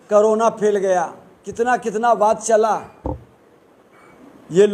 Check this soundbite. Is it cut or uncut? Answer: uncut